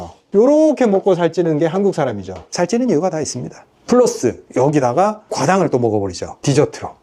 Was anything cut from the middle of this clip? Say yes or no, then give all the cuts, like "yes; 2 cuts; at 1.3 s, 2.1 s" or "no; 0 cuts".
no; 0 cuts